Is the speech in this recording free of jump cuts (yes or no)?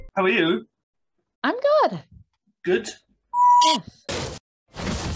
no